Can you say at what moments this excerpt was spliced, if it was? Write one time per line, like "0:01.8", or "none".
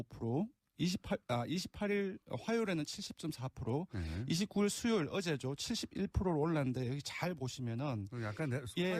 0:03.9